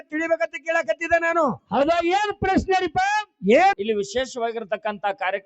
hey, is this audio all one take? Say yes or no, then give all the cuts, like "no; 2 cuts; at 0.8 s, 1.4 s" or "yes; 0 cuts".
no; 1 cut; at 3.8 s